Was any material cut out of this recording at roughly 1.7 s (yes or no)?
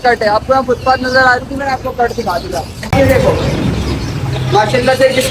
no